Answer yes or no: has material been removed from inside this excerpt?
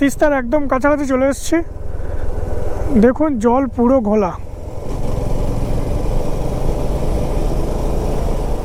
no